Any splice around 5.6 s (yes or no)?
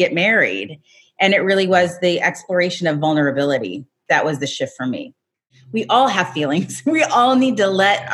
yes